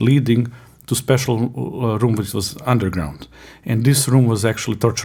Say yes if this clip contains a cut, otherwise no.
no